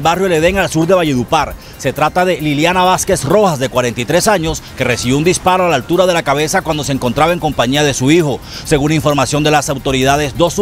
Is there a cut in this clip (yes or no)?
no